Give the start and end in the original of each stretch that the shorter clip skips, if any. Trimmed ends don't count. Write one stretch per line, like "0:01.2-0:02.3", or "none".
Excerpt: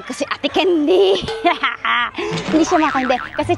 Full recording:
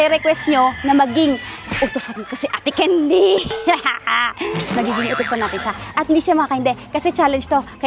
0:04.7-0:06.1

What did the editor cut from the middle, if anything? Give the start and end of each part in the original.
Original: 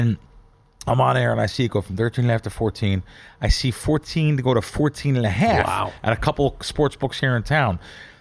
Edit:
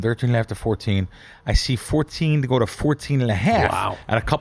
none

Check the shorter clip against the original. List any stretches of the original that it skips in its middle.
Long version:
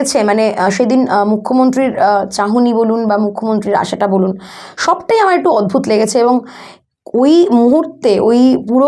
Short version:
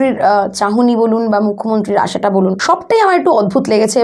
0:04.4-0:04.8

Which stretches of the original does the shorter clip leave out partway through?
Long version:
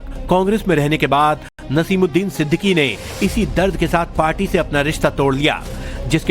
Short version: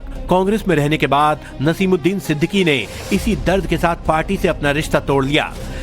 0:01.5-0:01.6

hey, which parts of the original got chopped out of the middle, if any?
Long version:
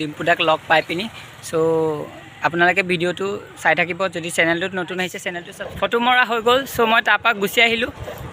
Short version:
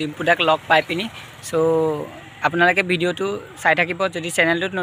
none

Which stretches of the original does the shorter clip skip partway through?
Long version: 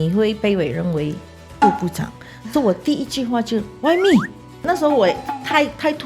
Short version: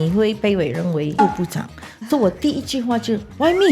0:01.1-0:01.5

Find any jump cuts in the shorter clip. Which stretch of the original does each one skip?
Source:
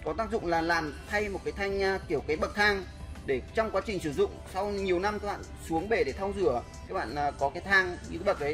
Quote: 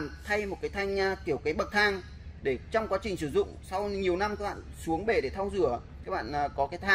none

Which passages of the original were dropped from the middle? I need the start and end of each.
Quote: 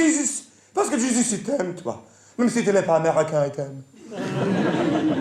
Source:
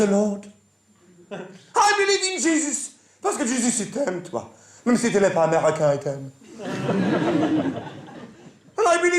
none

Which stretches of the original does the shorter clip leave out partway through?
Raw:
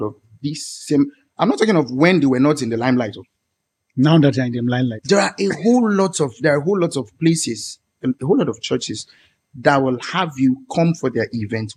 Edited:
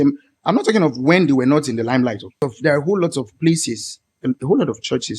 0:03.4-0:06.2

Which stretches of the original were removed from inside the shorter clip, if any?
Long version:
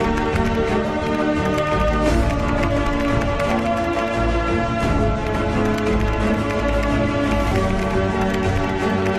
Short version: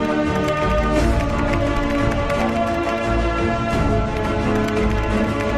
none

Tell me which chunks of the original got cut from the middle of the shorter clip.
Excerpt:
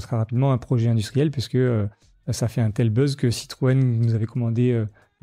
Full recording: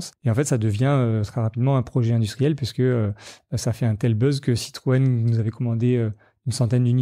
none

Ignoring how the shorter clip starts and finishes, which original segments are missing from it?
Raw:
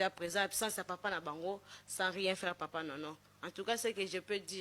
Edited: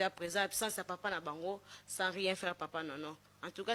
none

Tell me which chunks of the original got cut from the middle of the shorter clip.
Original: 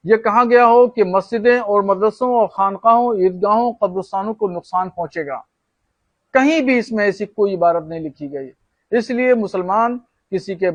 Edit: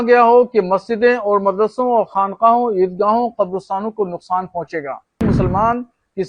0:05.6-0:09.4

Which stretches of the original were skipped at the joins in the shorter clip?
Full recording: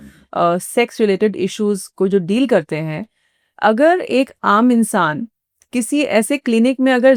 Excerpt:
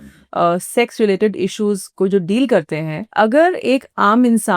0:03.0-0:03.4

